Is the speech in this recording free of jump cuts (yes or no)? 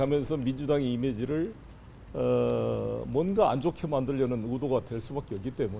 yes